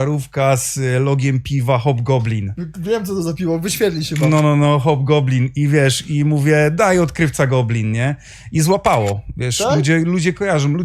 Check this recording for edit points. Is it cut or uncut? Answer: uncut